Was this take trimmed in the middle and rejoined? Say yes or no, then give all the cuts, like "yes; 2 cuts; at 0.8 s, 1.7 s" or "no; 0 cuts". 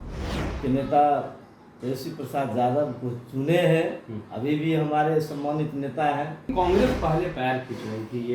yes; 1 cut; at 6.5 s